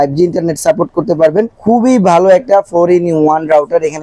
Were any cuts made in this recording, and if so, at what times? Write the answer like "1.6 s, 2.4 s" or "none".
none